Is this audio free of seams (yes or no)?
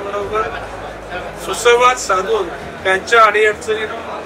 yes